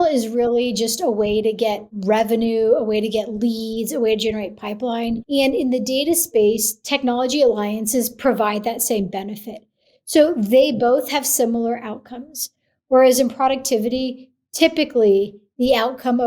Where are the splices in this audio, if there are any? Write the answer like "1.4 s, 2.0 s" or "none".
1.9 s, 5.2 s